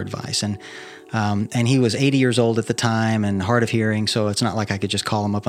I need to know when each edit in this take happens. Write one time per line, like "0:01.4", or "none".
none